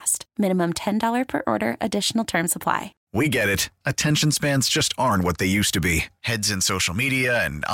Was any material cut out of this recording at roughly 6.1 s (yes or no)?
no